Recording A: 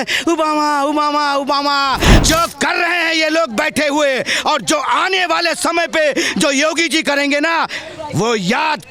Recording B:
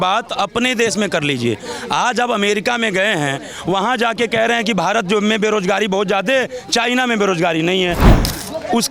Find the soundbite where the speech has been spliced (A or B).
A